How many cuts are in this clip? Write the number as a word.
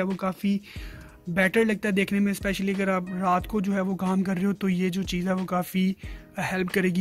zero